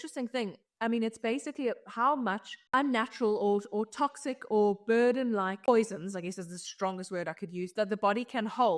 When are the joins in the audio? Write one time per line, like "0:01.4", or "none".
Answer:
0:02.7
0:05.7